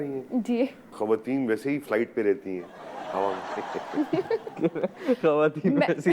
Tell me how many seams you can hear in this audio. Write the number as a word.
two